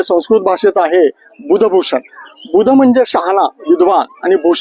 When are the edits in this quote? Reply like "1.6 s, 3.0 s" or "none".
none